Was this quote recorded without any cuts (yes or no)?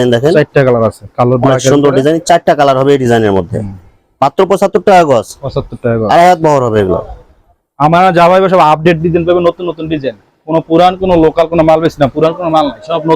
yes